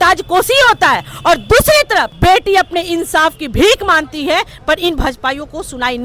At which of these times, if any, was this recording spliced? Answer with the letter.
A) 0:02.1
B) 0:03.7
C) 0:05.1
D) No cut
A